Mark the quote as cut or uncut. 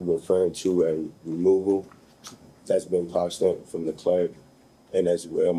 uncut